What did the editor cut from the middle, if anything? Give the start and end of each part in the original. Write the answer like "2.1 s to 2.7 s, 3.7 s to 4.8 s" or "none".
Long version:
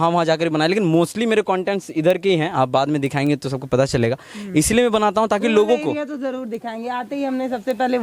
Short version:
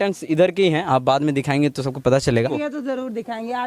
4.2 s to 5.9 s